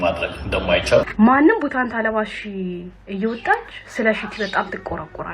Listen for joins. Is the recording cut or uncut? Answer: cut